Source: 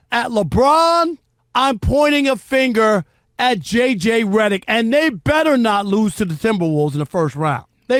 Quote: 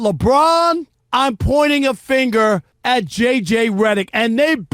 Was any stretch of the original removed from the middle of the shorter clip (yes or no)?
yes